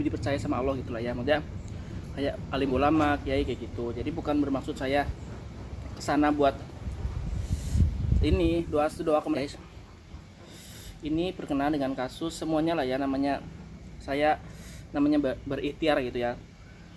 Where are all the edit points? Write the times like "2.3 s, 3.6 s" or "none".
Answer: 9.4 s